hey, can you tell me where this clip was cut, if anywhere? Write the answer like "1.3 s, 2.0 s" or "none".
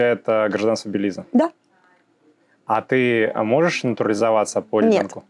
none